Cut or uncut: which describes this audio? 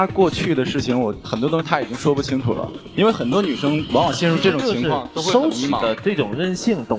uncut